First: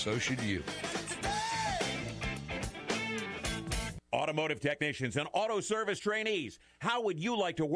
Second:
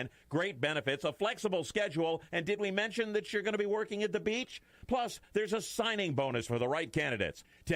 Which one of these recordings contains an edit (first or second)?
first